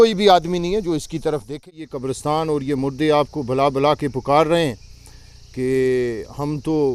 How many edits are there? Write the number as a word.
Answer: one